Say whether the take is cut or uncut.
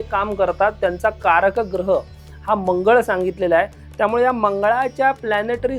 uncut